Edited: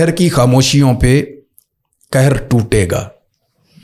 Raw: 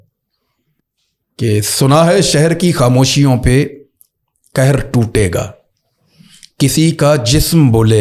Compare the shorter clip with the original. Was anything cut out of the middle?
no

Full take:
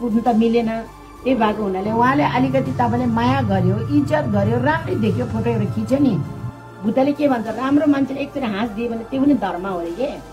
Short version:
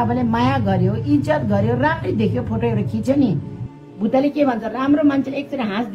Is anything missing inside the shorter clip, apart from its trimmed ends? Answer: no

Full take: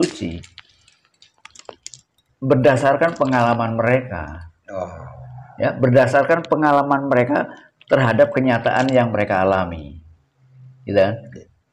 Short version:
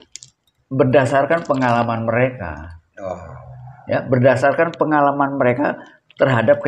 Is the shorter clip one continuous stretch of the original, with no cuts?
yes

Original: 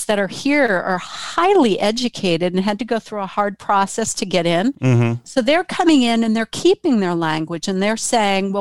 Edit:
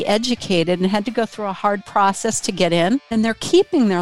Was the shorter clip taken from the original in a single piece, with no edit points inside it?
no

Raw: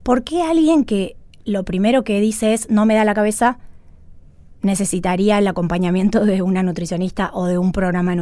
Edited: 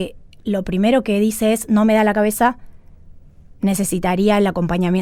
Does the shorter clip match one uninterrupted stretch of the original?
yes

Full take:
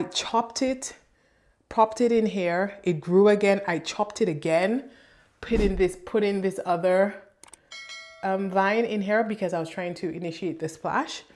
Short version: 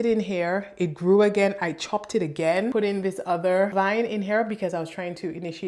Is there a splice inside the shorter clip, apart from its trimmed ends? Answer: yes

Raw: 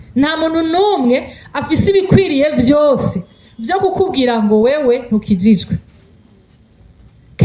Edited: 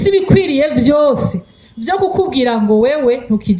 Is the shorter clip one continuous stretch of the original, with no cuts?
yes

